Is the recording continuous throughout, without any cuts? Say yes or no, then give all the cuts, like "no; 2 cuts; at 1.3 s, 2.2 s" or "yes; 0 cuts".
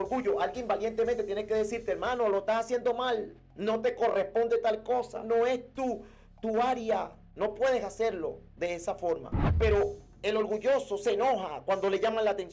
no; 2 cuts; at 7.2 s, 9.4 s